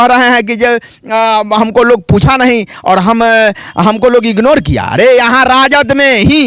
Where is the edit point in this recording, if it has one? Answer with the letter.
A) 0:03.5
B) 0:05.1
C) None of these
C